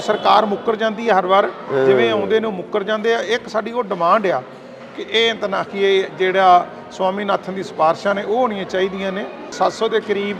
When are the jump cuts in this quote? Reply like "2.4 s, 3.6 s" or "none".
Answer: 9.5 s